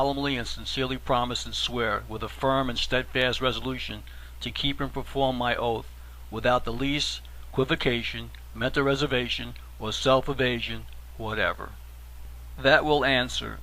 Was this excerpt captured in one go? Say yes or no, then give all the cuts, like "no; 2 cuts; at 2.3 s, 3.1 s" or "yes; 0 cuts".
no; 1 cut; at 7.9 s